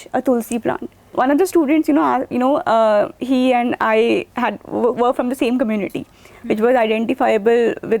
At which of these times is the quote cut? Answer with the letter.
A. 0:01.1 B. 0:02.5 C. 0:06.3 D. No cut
A